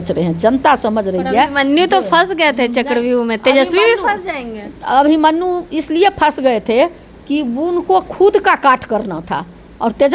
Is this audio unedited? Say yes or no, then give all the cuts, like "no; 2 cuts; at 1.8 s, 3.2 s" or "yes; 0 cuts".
yes; 0 cuts